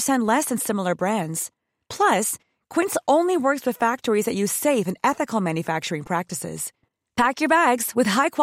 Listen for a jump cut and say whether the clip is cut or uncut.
uncut